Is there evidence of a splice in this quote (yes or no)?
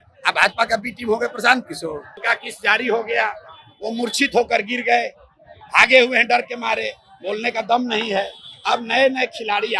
yes